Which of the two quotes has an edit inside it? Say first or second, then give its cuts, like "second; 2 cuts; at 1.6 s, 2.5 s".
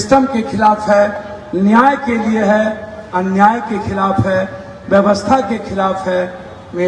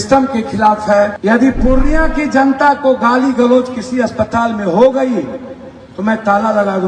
second; 1 cut; at 1.2 s